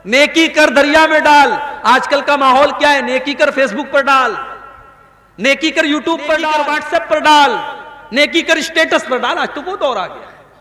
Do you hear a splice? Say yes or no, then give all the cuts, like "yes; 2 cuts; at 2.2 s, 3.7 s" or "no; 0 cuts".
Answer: yes; 1 cut; at 6.7 s